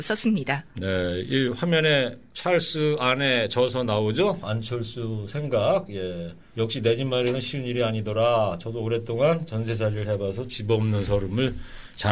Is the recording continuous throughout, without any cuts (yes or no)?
no